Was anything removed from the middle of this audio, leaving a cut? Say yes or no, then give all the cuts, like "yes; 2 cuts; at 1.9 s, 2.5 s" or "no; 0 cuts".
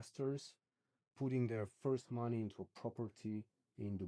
no; 0 cuts